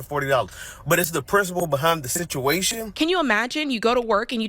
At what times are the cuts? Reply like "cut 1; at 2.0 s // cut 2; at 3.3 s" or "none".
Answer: cut 1; at 2.8 s